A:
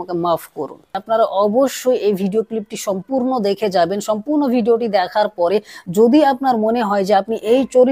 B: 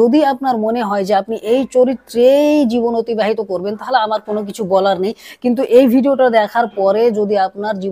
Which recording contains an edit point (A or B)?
A